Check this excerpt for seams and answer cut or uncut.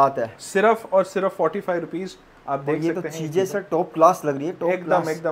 uncut